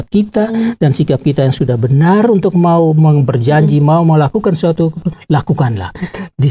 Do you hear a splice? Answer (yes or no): no